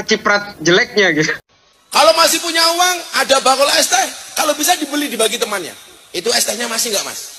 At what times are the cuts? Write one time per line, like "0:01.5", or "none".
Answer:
none